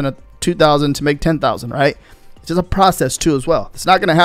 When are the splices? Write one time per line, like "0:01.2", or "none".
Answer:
none